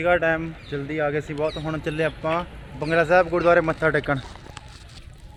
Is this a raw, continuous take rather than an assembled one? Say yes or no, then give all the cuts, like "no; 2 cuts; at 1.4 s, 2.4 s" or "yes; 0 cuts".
yes; 0 cuts